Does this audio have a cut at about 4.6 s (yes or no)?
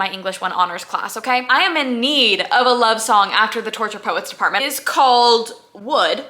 yes